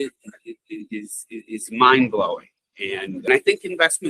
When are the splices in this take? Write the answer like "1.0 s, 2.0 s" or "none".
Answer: 3.2 s